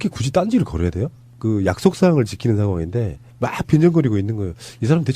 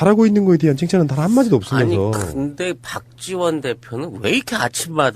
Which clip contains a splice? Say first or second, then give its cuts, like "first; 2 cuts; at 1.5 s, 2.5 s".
second; 1 cut; at 2.3 s